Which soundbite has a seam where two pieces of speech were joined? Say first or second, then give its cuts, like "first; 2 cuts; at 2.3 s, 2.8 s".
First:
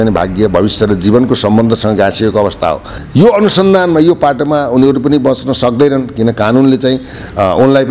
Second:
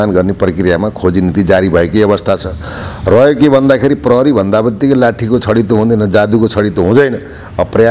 first; 1 cut; at 3.0 s